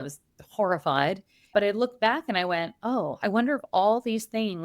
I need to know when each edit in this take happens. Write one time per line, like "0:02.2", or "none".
0:01.5